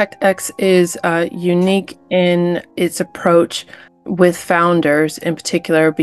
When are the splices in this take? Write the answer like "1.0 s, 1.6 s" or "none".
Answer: none